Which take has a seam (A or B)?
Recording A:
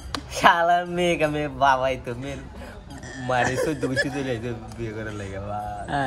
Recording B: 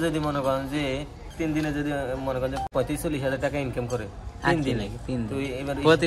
B